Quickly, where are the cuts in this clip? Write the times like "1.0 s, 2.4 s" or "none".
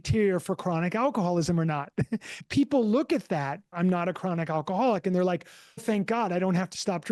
2.3 s, 3.7 s, 5.8 s